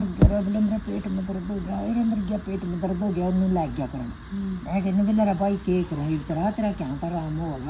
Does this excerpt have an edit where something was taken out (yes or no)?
no